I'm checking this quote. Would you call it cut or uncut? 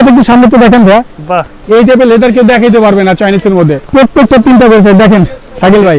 cut